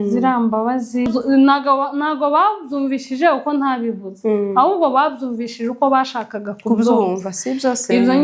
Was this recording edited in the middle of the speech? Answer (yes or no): yes